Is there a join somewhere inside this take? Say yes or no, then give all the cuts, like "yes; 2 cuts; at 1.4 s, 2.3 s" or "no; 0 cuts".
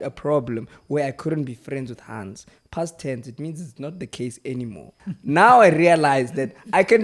no; 0 cuts